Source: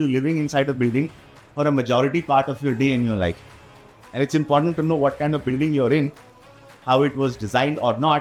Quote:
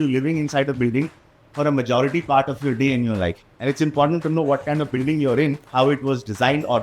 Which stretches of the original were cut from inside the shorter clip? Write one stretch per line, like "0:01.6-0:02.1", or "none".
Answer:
0:03.5-0:04.0
0:06.2-0:06.8